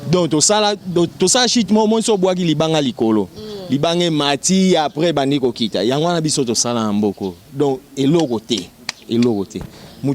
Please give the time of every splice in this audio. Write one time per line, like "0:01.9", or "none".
none